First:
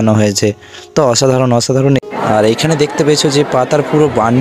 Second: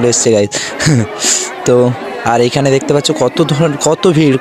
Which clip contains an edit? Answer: first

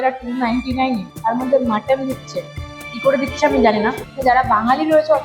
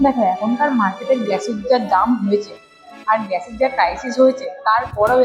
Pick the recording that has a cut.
first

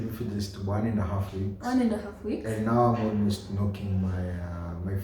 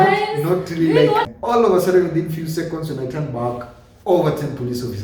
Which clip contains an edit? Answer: second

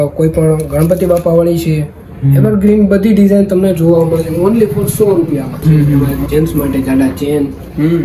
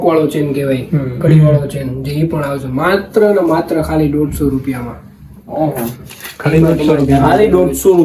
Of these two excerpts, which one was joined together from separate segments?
first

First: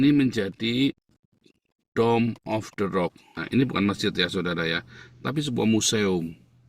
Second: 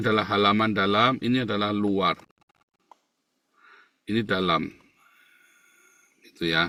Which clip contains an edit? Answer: first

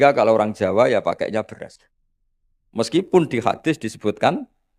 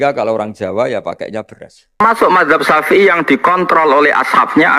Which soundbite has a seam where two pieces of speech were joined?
second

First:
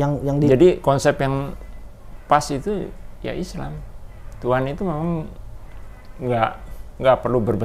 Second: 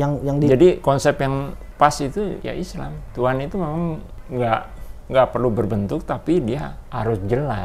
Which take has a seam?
second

